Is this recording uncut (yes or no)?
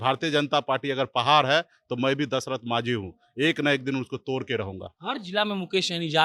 yes